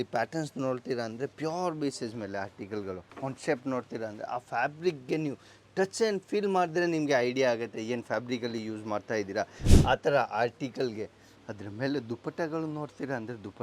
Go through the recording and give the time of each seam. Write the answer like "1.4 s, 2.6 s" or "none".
3.1 s, 9.6 s